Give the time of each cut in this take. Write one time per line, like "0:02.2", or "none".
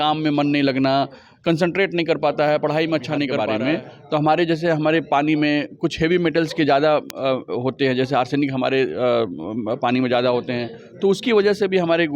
0:03.3